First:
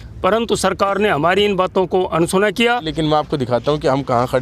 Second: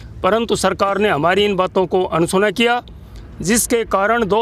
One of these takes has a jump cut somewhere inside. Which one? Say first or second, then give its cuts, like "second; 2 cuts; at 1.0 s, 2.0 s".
first; 1 cut; at 2.9 s